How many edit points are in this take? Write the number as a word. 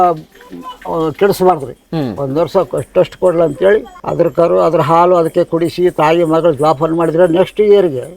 zero